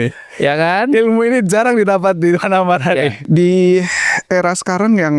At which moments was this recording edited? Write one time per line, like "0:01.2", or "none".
0:03.2